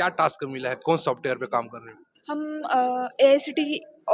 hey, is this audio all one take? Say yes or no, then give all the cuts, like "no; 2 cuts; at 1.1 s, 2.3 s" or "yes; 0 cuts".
yes; 0 cuts